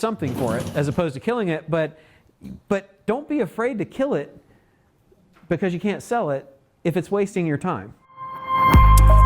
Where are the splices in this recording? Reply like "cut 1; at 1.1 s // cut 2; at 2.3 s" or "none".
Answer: cut 1; at 8.3 s